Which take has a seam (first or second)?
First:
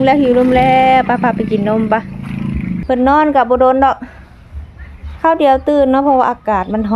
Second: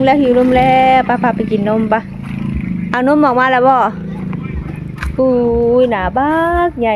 first